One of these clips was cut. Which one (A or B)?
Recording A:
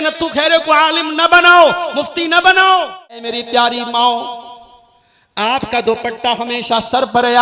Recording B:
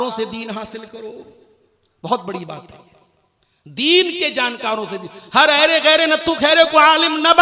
A